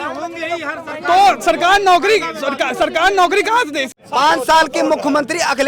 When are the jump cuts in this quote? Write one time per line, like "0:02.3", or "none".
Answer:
0:04.0

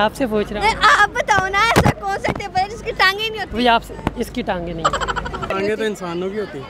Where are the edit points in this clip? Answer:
0:05.5

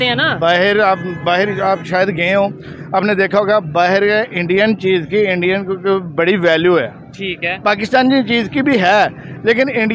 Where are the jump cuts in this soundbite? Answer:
none

